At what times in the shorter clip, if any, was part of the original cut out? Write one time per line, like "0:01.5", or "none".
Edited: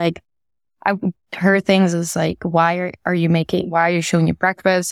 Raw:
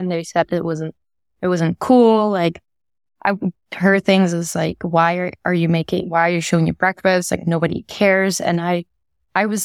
none